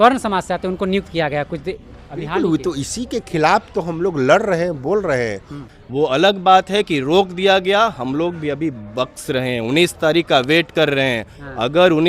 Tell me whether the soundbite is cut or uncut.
cut